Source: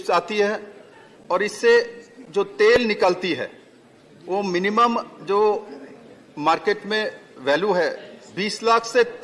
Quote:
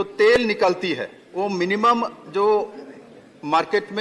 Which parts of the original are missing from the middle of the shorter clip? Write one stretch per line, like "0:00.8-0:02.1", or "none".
0:03.6-0:04.1